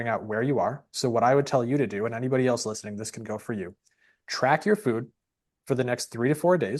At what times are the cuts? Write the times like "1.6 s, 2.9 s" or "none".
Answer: none